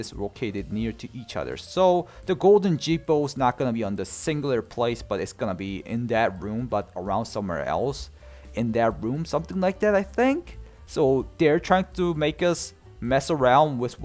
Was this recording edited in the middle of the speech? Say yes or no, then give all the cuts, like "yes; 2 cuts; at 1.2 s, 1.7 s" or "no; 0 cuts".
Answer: no; 0 cuts